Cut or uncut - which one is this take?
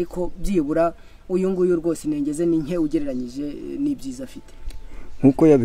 uncut